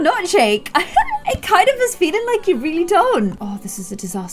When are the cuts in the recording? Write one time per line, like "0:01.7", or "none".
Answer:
0:03.3